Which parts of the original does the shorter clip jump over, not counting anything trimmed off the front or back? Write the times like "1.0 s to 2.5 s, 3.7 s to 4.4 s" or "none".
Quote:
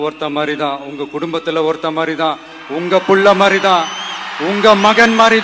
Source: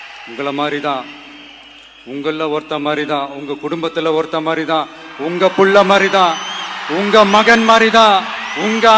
none